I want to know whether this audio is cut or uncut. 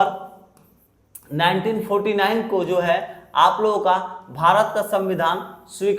uncut